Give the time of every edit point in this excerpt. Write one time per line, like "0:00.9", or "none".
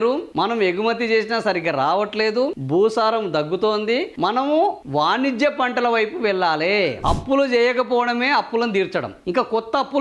0:07.0